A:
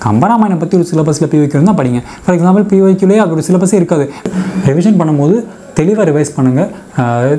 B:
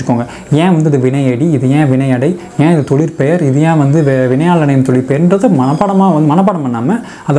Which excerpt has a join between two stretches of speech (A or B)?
A